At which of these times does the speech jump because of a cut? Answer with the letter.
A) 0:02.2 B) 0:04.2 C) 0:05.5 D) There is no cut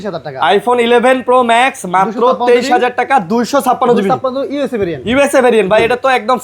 D